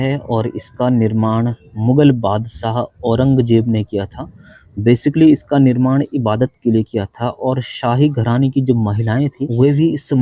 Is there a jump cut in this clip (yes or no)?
no